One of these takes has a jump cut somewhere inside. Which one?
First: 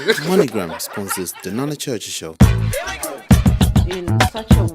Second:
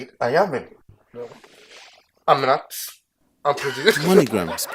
first; 1 cut; at 2.3 s

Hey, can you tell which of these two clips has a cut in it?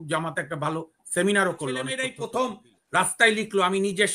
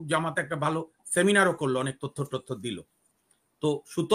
first; 1 cut; at 2.0 s

